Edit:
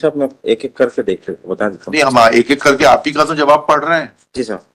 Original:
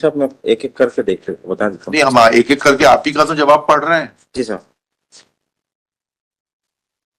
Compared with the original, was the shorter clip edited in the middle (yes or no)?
no